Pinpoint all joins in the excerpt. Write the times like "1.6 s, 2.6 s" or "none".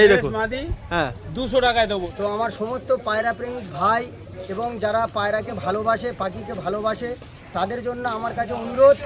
2.1 s